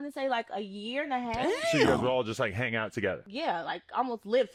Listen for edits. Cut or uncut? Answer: uncut